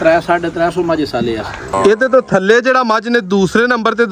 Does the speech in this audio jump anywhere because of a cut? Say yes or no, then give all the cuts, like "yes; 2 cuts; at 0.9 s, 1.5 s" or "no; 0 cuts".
yes; 1 cut; at 1.6 s